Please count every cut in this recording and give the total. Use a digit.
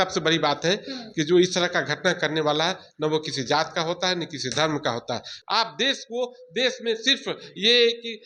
1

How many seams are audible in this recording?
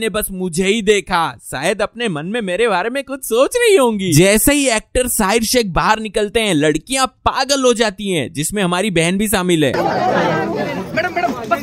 2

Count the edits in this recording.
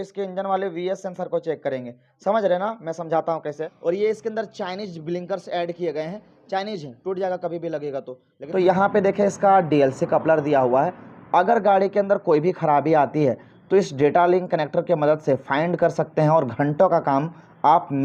2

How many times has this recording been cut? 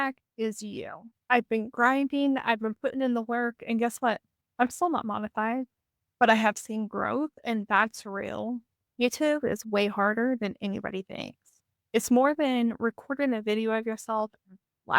2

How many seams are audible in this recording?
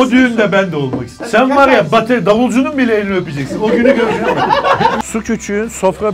2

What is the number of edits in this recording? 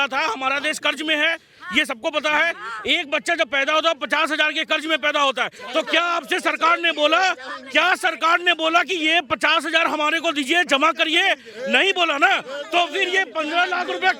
0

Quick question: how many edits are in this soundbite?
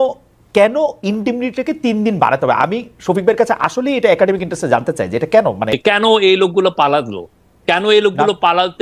1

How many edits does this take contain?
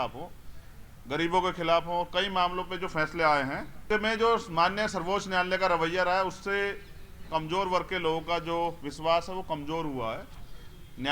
1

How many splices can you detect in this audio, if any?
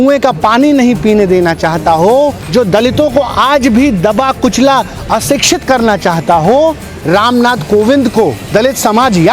3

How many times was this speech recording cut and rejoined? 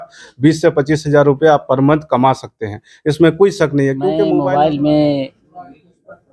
1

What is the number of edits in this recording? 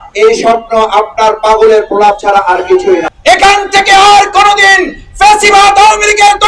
1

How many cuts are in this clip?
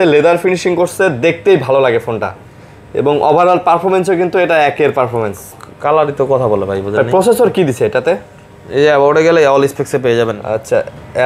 0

